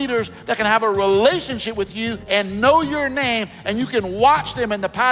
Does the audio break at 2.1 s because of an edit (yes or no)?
yes